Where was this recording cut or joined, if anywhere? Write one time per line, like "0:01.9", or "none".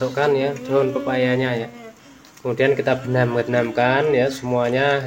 none